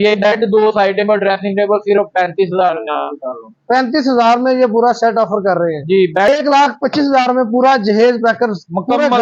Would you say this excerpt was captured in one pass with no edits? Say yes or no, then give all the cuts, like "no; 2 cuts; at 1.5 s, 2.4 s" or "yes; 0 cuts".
no; 1 cut; at 6.3 s